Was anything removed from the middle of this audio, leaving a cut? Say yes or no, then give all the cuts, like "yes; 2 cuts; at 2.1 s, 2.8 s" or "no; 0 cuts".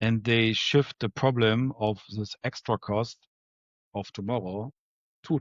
no; 0 cuts